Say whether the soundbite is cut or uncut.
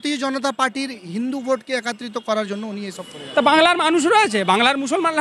cut